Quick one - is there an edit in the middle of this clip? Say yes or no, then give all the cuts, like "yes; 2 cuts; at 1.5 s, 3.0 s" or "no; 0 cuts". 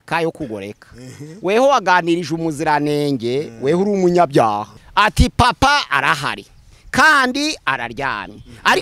yes; 1 cut; at 4.8 s